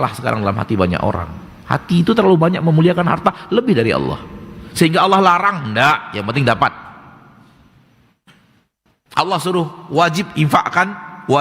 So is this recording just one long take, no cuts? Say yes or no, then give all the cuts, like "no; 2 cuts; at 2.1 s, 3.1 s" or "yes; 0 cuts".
yes; 0 cuts